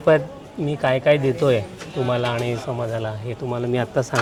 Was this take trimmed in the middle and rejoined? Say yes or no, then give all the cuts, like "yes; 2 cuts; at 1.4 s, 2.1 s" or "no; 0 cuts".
no; 0 cuts